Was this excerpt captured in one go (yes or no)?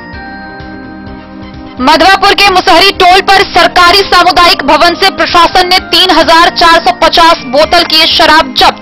no